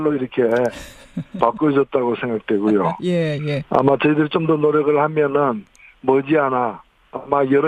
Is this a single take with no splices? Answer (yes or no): yes